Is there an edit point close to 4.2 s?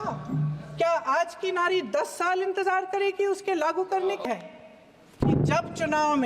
yes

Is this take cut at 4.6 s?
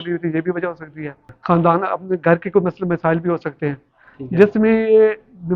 no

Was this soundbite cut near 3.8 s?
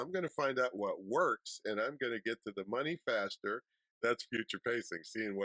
yes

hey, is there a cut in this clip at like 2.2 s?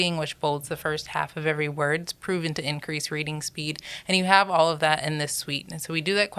no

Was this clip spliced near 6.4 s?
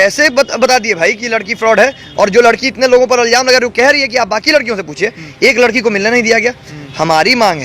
no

